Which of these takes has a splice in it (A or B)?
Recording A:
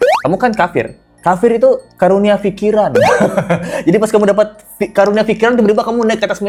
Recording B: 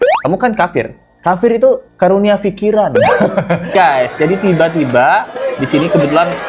B